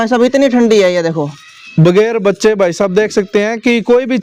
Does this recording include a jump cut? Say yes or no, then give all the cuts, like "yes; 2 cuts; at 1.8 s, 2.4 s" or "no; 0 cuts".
no; 0 cuts